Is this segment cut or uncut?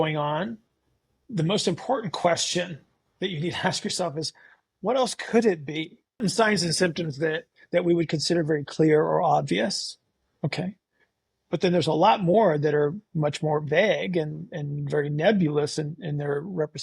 cut